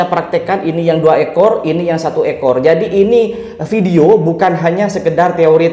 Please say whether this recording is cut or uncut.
uncut